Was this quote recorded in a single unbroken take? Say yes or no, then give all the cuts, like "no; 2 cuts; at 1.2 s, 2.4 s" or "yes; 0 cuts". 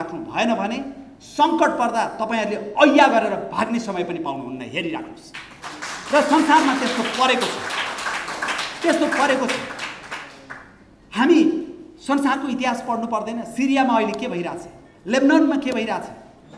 yes; 0 cuts